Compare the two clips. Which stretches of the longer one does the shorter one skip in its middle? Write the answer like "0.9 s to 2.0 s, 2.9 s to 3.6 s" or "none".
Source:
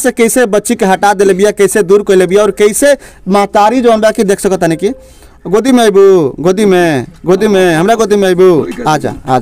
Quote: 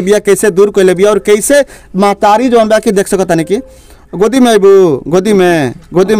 none